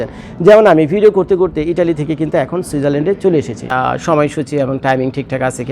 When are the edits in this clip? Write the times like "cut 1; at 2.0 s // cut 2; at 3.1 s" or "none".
cut 1; at 3.6 s